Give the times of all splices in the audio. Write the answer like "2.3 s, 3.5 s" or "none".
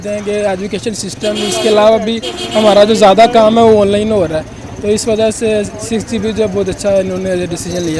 none